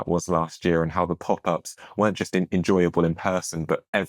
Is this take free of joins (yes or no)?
yes